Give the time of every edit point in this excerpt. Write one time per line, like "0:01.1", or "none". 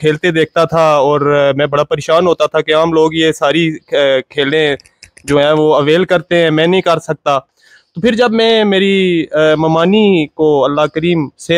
none

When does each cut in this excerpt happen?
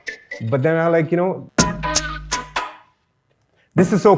0:01.4

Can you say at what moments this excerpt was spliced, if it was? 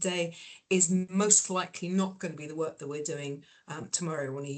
none

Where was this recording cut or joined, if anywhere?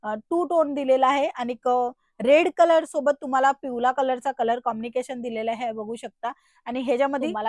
none

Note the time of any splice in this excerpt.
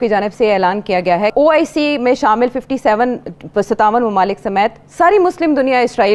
0:01.3

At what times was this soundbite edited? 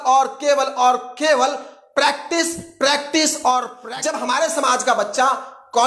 0:03.8

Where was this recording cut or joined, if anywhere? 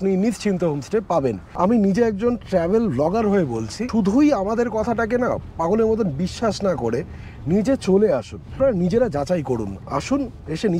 0:01.5
0:03.8
0:08.6

